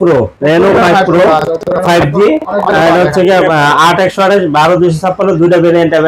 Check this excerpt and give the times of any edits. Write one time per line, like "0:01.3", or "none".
none